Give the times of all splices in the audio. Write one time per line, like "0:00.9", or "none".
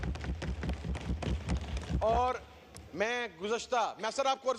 none